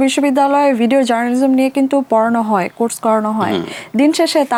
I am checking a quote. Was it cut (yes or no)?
no